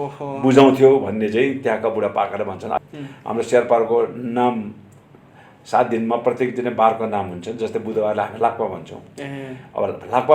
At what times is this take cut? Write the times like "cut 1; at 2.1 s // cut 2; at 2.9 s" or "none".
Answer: cut 1; at 2.8 s